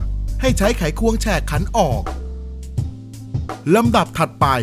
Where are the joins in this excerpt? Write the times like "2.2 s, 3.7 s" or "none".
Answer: 2.0 s, 3.6 s